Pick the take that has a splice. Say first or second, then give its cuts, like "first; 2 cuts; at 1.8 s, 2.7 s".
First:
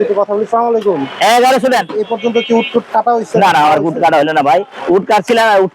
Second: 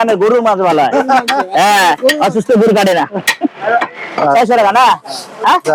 first; 1 cut; at 2.0 s